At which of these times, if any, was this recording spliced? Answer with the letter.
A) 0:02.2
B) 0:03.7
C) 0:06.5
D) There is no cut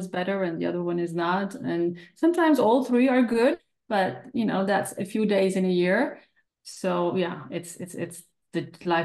B